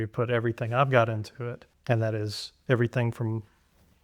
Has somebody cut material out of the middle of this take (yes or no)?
yes